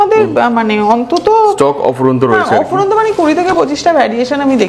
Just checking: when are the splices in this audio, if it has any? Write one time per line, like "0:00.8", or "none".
none